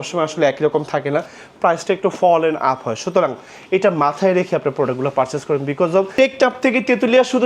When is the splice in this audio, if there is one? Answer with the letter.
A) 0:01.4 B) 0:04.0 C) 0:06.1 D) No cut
C